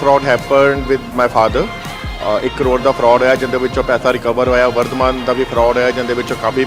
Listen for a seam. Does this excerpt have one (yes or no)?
no